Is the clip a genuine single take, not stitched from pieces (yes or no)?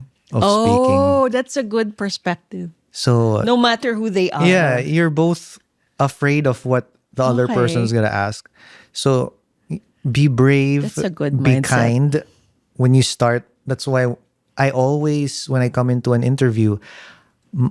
yes